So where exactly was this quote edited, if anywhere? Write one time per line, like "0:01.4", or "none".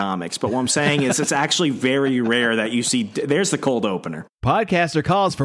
0:04.5